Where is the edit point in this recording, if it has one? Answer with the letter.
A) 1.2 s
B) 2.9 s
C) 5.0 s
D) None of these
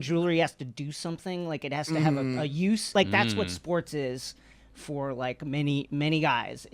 B